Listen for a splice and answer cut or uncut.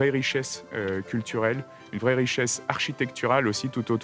uncut